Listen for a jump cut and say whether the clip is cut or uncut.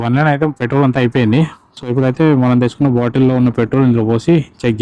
uncut